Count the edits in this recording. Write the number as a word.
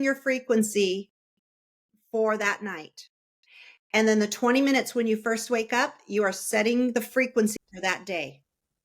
one